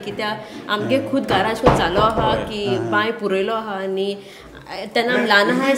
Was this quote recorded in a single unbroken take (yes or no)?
yes